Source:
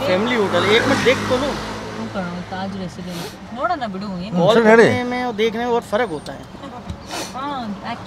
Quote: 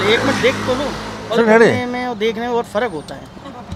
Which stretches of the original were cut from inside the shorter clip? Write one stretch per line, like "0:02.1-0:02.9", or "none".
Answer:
0:02.0-0:04.5